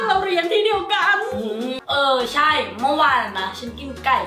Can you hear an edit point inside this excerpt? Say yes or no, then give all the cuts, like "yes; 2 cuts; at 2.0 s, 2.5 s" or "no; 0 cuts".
yes; 1 cut; at 1.8 s